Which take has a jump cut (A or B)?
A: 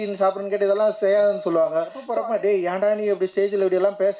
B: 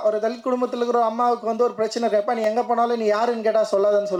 A